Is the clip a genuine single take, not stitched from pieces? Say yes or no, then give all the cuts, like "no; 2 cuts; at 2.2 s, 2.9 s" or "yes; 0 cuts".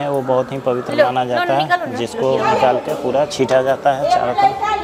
yes; 0 cuts